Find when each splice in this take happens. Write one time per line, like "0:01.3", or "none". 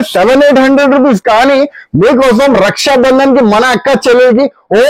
none